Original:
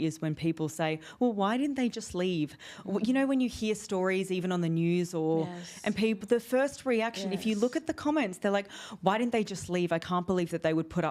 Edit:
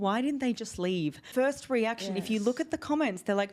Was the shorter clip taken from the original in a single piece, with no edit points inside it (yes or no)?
no